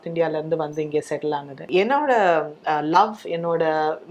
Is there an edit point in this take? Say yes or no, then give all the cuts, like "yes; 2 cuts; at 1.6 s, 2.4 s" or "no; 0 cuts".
yes; 1 cut; at 1.6 s